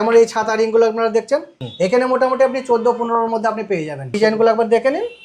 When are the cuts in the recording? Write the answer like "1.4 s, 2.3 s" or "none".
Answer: 1.5 s, 4.1 s